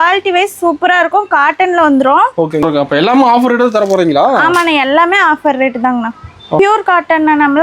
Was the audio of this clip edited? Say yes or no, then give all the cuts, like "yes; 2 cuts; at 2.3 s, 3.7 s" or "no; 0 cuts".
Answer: yes; 2 cuts; at 2.6 s, 6.6 s